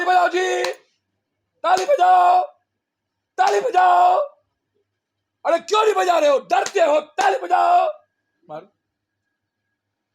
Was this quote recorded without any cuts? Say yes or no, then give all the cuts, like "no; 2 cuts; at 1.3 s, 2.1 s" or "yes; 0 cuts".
yes; 0 cuts